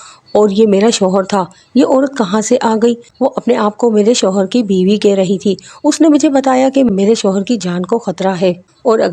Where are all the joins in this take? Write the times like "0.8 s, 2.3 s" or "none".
3.1 s, 6.9 s